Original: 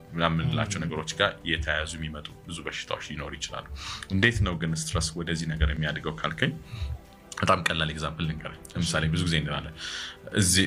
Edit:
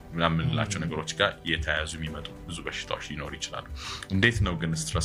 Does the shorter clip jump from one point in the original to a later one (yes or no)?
no